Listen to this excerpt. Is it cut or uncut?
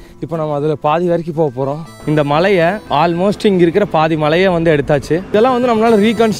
cut